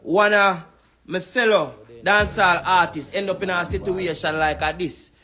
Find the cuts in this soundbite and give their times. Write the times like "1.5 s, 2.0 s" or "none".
none